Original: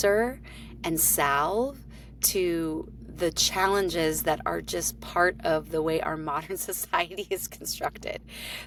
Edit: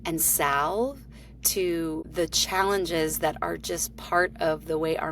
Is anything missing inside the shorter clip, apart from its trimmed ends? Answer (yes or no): yes